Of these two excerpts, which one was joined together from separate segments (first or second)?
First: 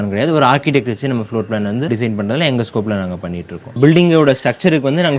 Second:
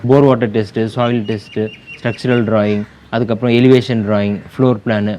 first